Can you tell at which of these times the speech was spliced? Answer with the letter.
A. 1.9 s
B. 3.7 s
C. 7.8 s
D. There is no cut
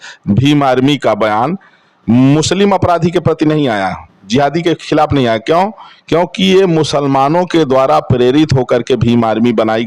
D